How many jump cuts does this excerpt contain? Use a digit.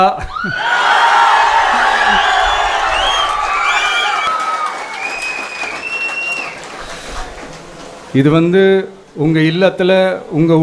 1